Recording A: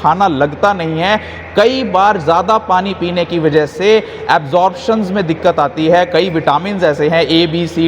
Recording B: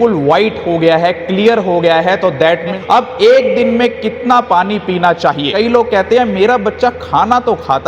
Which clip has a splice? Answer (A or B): B